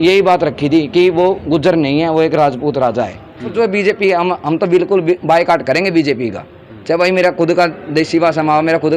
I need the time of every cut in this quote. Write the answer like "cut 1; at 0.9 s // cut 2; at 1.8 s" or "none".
cut 1; at 3.5 s